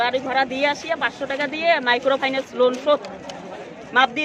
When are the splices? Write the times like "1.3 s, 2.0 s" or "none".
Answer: none